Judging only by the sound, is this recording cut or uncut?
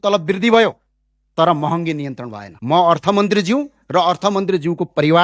cut